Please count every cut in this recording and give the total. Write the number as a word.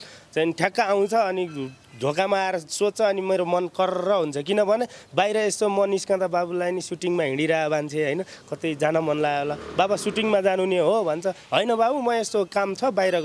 zero